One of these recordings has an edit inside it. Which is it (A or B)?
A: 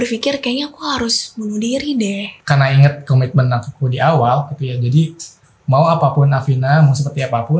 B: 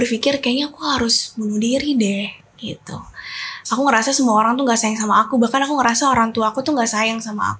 A